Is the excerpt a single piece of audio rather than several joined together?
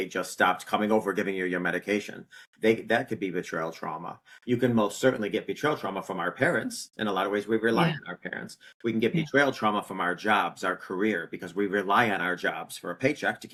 yes; 0 cuts

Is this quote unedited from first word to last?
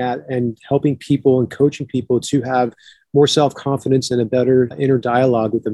no; 1 cut; at 4.7 s

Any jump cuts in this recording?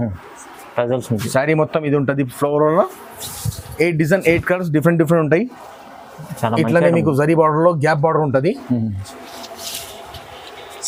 no; 0 cuts

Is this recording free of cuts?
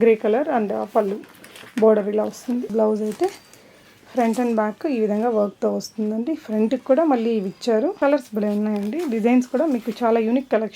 no; 2 cuts; at 2.7 s, 7.9 s

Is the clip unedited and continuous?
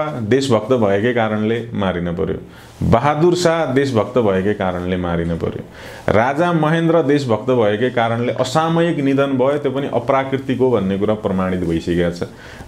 yes; 0 cuts

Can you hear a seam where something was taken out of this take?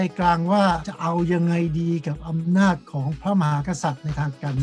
yes; 1 cut; at 0.9 s

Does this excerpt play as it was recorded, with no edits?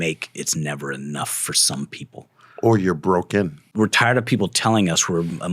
no; 1 cut; at 3.6 s

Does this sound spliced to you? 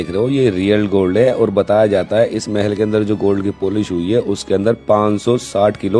no; 0 cuts

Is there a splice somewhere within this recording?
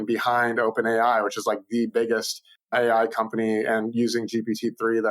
yes; 1 cut; at 2.7 s

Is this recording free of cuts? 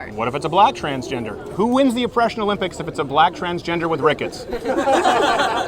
no; 1 cut; at 1.5 s

